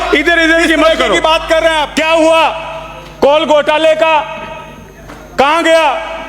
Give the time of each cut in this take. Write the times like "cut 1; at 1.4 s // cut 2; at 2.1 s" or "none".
cut 1; at 1.9 s